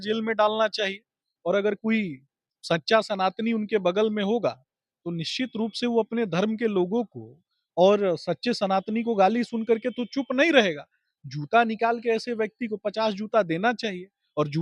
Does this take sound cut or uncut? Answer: uncut